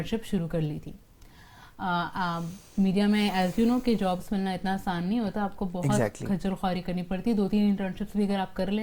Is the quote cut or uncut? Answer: uncut